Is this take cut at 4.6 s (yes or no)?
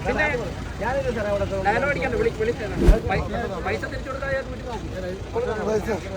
no